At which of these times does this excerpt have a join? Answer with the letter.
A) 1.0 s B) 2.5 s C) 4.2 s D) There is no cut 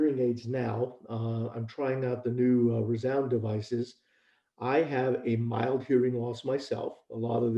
D